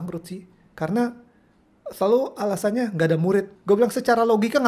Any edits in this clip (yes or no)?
yes